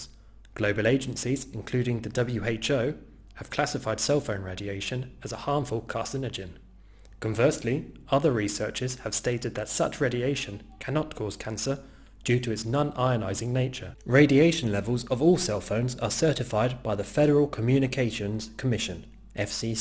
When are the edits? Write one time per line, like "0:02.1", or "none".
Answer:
0:17.1